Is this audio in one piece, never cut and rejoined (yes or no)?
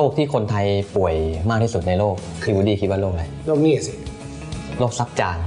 yes